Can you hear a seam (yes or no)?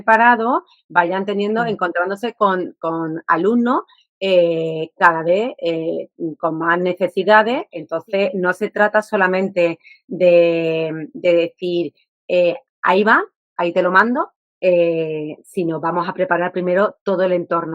yes